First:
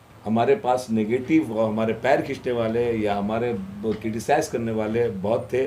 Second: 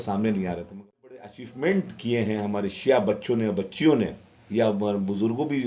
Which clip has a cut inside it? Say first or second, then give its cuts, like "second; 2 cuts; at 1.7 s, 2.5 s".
second; 1 cut; at 1.0 s